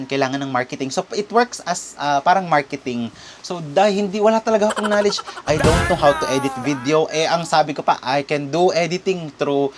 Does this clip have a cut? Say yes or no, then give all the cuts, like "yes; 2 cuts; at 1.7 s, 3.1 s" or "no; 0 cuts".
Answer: no; 0 cuts